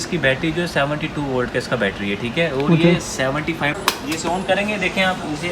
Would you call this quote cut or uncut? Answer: cut